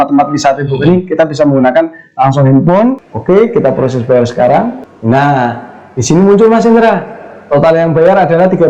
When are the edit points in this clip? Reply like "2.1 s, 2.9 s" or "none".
3.0 s